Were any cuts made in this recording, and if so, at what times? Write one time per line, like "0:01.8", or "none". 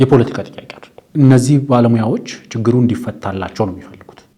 0:01.0